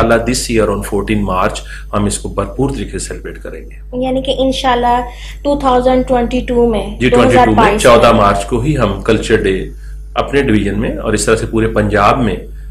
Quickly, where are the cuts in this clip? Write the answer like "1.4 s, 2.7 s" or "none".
none

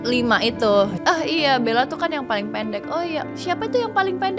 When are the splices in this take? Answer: 1.0 s, 3.2 s

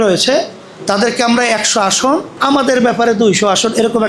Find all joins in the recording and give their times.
2.3 s

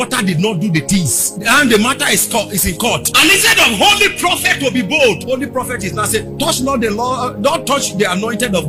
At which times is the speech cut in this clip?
none

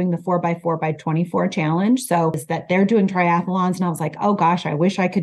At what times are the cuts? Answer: 2.4 s

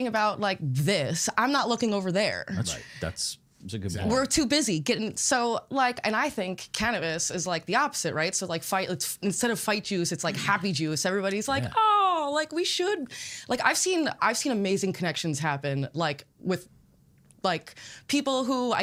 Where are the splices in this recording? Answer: none

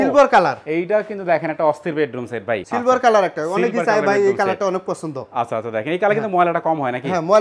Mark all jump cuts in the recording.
none

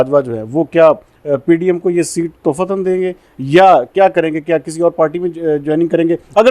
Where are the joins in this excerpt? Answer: none

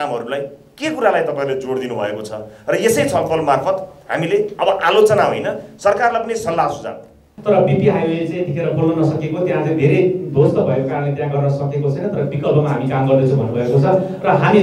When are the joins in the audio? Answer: 7.3 s

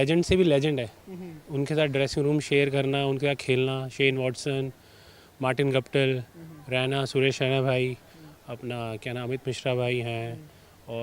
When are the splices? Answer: none

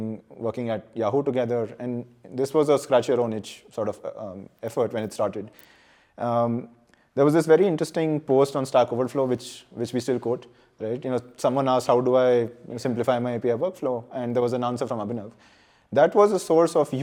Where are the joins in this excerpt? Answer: none

